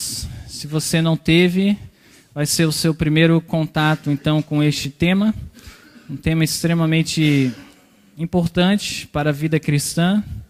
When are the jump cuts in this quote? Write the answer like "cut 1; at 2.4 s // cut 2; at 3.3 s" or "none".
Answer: none